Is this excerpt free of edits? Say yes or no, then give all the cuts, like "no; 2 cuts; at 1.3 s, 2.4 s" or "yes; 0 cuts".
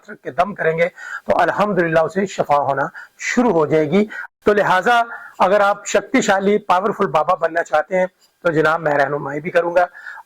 no; 1 cut; at 4.2 s